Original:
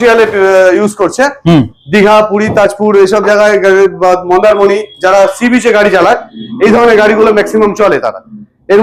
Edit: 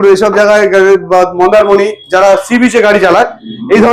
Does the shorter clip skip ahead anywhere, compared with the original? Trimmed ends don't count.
no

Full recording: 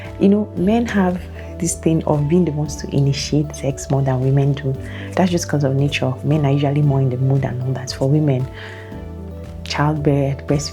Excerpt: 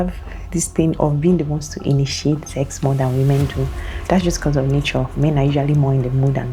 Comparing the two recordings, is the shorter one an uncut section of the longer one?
yes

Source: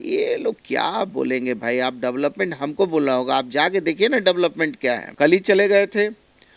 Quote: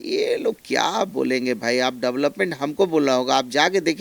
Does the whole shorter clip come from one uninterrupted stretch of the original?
yes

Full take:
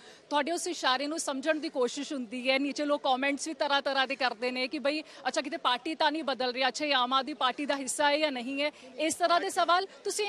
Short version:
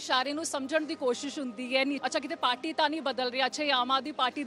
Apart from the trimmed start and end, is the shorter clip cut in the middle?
yes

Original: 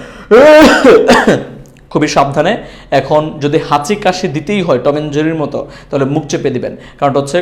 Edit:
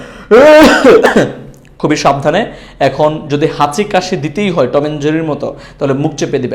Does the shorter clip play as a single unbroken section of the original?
no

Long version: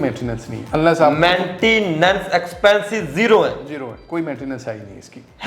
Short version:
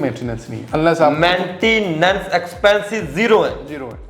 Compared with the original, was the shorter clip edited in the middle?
no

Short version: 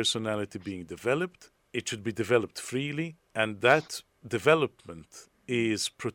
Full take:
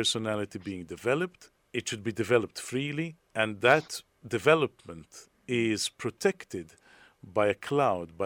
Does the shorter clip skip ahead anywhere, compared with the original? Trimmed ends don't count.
no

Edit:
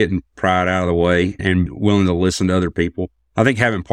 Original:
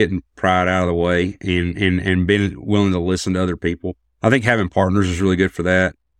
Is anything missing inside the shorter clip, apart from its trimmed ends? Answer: yes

